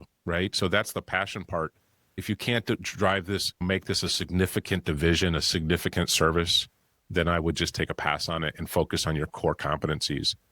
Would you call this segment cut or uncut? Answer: cut